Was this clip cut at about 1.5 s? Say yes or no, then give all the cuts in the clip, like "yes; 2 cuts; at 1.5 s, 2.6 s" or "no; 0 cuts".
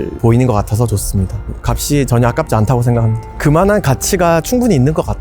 yes; 1 cut; at 1.5 s